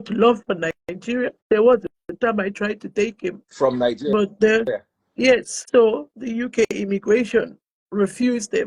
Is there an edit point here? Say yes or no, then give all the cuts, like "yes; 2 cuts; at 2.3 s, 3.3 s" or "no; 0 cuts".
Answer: yes; 3 cuts; at 1.4 s, 2.0 s, 5.5 s